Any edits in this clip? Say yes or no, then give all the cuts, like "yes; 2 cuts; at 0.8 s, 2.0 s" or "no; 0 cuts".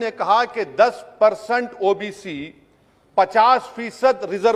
no; 0 cuts